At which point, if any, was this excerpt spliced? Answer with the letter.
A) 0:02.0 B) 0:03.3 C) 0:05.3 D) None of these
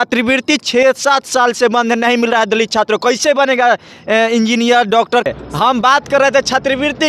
C